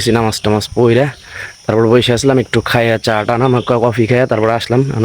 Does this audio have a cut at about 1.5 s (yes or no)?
no